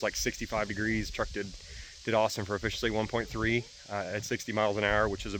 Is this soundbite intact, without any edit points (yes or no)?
yes